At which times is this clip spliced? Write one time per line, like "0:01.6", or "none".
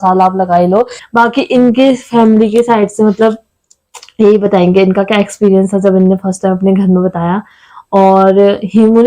0:01.0